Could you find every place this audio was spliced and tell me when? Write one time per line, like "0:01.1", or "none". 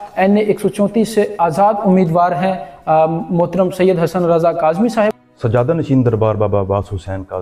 0:05.3